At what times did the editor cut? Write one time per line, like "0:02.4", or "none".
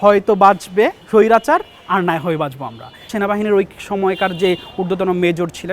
0:01.0
0:03.1